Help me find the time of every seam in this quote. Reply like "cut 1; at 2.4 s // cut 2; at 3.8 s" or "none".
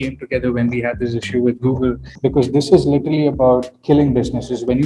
cut 1; at 2.1 s